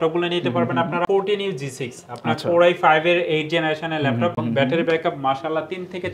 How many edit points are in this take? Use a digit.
2